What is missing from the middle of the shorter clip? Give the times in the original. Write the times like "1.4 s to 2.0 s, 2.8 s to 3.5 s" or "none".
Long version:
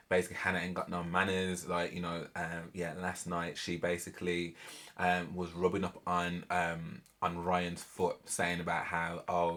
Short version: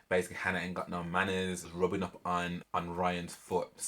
1.7 s to 5.5 s, 6.4 s to 7.1 s